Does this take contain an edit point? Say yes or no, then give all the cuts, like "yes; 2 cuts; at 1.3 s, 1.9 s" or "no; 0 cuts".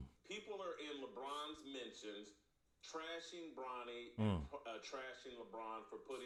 no; 0 cuts